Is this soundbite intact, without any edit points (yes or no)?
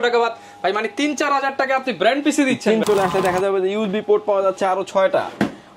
no